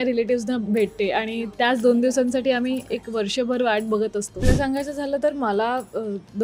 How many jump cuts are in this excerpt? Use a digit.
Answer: 1